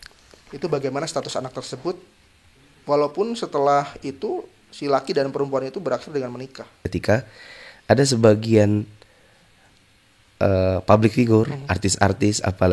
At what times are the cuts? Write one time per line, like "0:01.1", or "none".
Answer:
0:06.9